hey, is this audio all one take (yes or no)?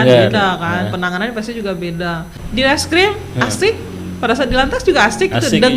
no